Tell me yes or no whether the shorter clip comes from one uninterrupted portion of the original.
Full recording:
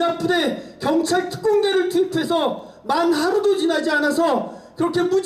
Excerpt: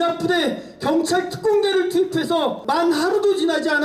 no